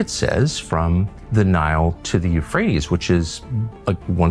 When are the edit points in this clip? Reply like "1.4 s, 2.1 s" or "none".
1.2 s